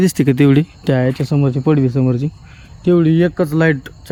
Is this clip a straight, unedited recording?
yes; 0 cuts

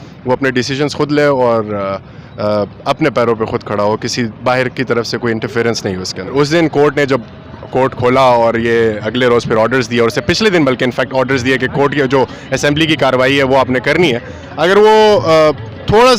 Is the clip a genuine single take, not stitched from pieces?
no; 1 cut; at 6.3 s

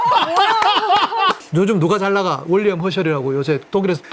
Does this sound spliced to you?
yes; 1 cut; at 1.4 s

